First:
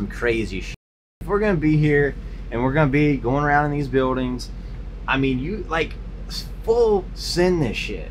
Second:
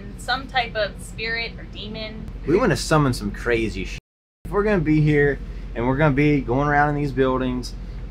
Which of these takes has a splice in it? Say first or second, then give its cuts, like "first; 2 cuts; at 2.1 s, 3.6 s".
second; 1 cut; at 2.3 s